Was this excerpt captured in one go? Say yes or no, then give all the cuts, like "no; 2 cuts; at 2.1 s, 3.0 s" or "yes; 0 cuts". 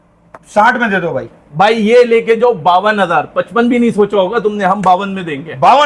yes; 0 cuts